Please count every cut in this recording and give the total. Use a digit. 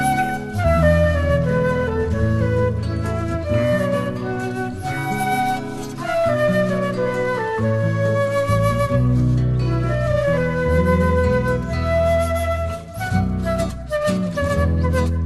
0